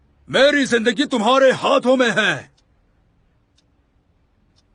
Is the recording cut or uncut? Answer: uncut